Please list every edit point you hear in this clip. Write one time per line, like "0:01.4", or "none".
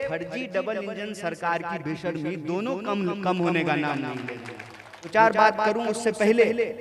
0:05.1